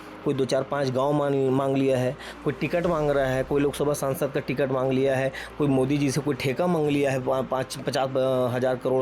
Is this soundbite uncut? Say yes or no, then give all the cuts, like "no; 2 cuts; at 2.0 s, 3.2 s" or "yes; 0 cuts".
yes; 0 cuts